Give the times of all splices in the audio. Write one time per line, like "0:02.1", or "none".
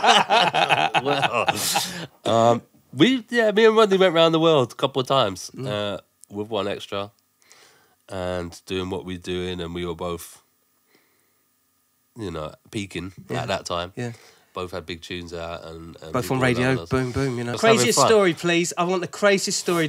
0:17.5